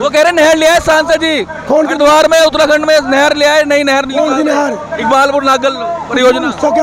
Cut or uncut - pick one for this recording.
uncut